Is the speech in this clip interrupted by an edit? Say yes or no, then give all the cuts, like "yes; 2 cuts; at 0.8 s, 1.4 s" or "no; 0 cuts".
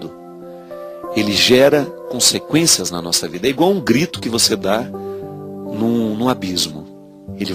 no; 0 cuts